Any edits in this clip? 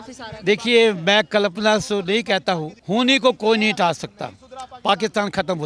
yes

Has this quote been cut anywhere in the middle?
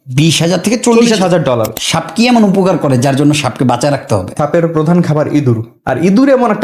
yes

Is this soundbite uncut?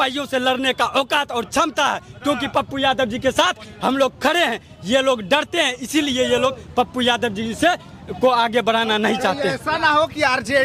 yes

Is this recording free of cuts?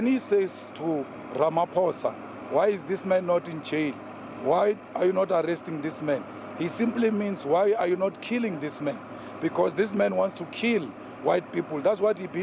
yes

